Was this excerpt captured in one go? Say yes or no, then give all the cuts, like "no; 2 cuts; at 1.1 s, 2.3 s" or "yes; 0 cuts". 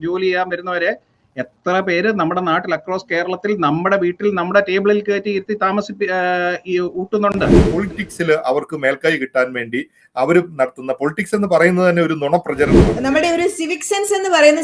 no; 2 cuts; at 7.6 s, 12.9 s